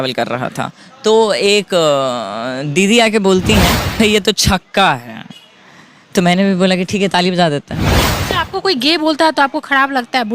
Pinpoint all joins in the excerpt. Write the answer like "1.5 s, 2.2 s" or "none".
4.0 s, 8.1 s